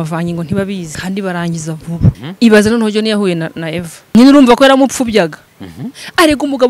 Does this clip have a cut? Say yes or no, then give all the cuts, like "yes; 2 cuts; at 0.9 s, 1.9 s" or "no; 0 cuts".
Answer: yes; 3 cuts; at 0.9 s, 2.2 s, 4.1 s